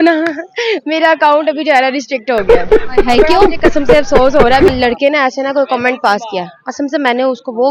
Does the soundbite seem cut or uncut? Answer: cut